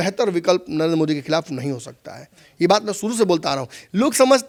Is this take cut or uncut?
uncut